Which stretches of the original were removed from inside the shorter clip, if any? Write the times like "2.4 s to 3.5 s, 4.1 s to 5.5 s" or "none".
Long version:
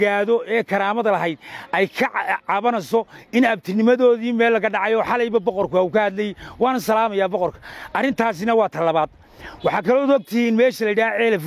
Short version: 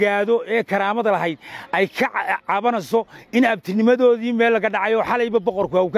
none